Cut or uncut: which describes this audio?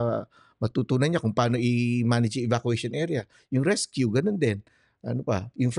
uncut